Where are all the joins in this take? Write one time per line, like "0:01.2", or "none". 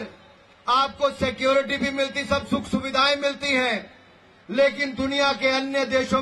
none